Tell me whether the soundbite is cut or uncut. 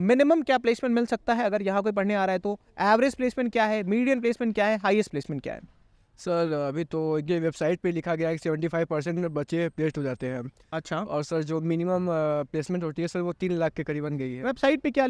uncut